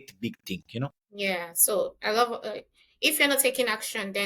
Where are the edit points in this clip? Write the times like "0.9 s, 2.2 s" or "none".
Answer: 1.0 s